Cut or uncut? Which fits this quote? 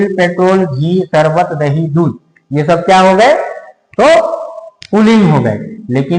uncut